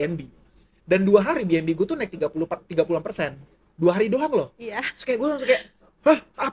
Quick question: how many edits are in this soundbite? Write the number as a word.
zero